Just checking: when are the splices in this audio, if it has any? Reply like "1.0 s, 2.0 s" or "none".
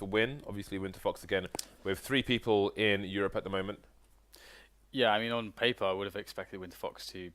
5.5 s